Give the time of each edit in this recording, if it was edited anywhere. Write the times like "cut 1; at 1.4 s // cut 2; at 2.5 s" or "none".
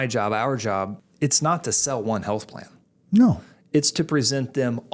cut 1; at 1.0 s